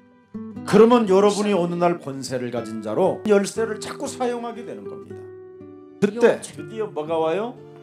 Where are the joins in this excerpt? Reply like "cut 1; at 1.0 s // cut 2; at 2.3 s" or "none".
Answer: cut 1; at 2.0 s // cut 2; at 3.3 s